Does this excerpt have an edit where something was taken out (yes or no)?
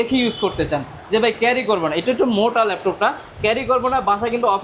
no